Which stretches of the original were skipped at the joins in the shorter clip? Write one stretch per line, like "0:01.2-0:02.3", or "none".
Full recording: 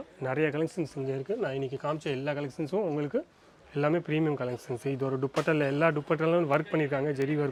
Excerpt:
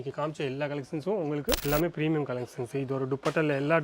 0:03.3-0:03.7